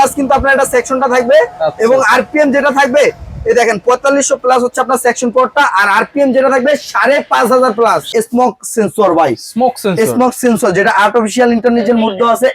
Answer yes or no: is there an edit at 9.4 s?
no